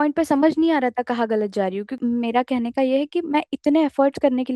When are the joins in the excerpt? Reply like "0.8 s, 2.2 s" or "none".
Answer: 2.0 s